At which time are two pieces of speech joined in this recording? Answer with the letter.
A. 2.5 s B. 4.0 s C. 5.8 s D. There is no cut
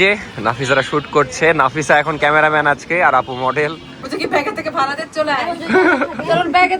B